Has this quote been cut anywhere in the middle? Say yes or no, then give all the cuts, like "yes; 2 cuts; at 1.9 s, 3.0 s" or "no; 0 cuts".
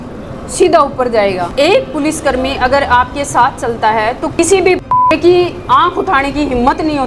yes; 2 cuts; at 1.5 s, 4.3 s